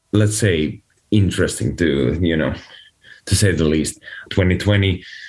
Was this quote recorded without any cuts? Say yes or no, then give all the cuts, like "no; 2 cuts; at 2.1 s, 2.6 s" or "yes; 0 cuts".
no; 1 cut; at 4.3 s